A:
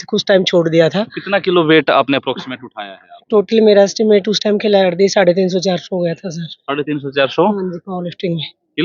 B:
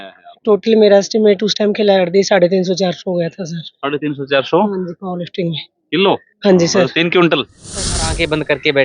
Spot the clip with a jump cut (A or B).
B